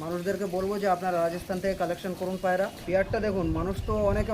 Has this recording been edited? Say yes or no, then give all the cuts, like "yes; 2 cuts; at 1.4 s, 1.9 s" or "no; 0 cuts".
yes; 1 cut; at 2.8 s